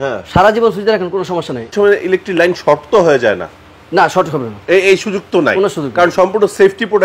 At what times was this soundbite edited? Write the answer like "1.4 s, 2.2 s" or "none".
1.7 s

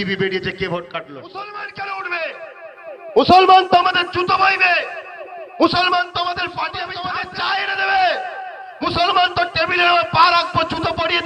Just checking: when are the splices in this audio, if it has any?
1.6 s, 7.1 s

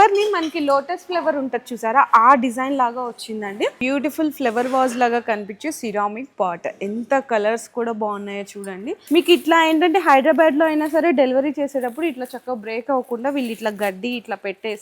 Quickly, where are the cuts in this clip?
3.8 s, 8.9 s

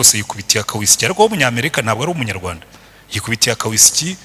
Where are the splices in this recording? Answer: none

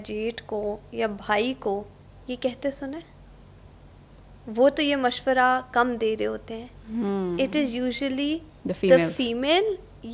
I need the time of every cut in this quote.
none

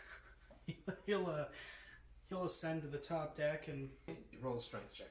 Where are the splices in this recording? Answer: 4.1 s

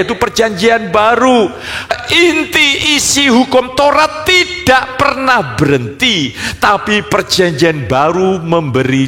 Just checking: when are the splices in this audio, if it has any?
1.9 s

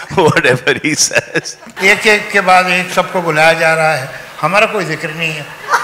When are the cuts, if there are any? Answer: 1.6 s

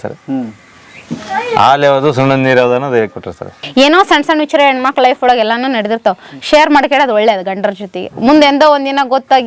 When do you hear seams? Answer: 3.6 s

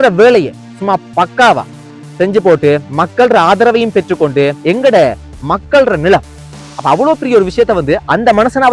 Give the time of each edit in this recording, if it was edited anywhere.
4.6 s

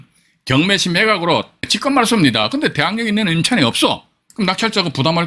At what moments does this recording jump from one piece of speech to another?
1.7 s

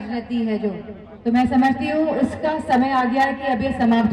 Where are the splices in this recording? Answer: none

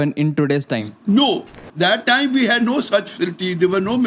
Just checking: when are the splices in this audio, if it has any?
none

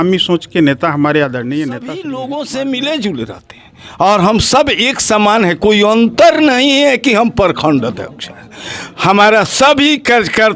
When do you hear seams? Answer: 2.0 s

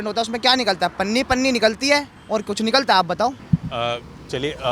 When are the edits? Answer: none

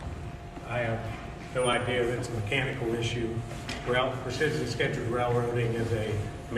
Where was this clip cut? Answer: 2.1 s

